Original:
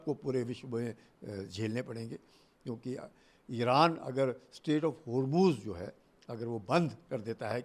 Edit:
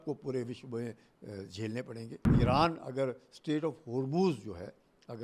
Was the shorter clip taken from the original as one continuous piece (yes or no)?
no